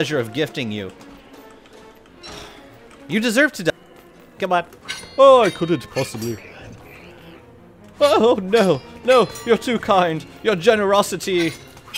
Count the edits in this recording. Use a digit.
1